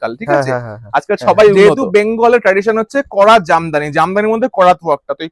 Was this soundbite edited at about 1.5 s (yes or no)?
yes